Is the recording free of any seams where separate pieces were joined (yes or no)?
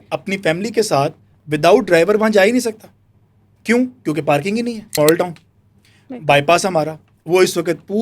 no